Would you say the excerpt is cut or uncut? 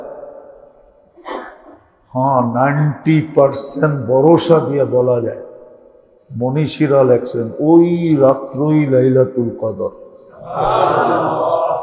uncut